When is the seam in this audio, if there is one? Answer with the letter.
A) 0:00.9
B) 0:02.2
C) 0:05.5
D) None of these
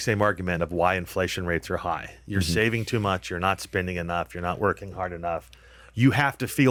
D